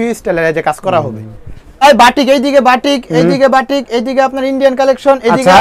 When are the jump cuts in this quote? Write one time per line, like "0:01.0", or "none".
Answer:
0:01.8